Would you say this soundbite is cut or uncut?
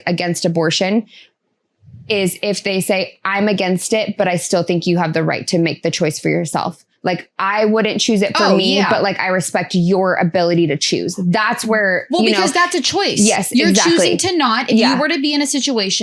uncut